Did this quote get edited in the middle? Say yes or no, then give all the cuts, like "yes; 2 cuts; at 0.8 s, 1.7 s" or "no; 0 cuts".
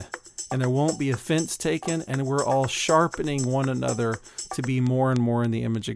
no; 0 cuts